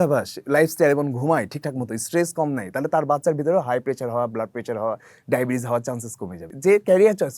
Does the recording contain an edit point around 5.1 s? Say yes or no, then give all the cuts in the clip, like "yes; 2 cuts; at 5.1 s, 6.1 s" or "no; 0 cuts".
no; 1 cut; at 6.4 s